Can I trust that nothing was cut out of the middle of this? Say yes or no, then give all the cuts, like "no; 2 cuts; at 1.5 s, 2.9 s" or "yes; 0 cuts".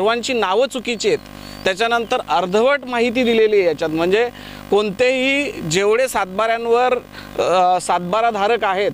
yes; 0 cuts